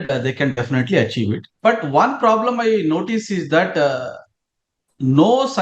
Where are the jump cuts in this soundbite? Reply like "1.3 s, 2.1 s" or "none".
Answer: 1.5 s